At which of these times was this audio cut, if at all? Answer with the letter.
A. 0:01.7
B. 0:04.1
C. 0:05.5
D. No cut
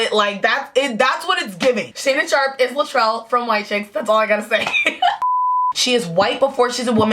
C